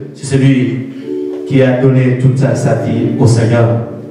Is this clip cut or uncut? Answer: uncut